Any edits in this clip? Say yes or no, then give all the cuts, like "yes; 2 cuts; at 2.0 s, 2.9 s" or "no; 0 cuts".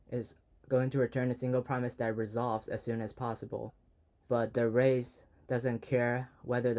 yes; 1 cut; at 3.8 s